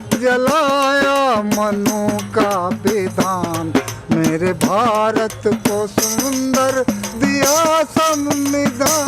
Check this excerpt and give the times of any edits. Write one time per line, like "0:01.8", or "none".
none